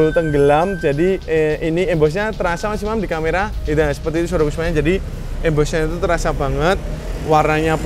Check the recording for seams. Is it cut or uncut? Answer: uncut